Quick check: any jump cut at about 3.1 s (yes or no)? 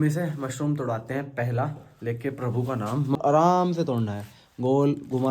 yes